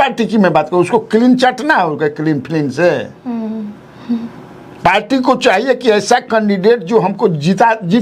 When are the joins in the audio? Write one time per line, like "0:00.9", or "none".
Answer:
none